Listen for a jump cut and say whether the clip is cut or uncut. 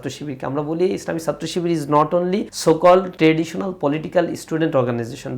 cut